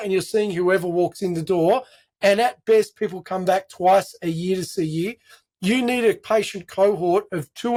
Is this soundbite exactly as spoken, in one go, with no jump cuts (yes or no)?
yes